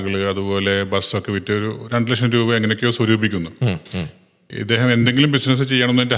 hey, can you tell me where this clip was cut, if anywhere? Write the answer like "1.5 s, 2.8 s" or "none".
none

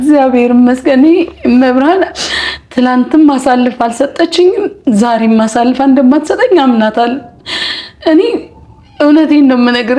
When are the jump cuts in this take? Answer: none

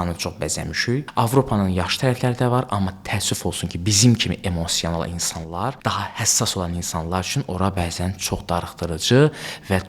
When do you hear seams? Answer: 1.1 s, 5.8 s

